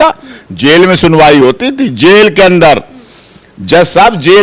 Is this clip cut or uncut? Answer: uncut